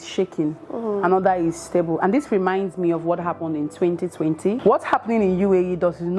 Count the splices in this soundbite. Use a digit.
1